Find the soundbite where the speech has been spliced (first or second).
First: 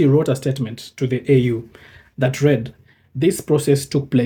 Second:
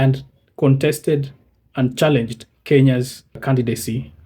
second